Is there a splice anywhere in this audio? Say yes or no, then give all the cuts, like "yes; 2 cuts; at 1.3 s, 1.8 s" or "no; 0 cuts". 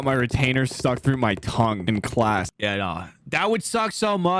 yes; 1 cut; at 2.5 s